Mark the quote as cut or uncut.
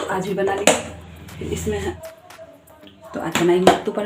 cut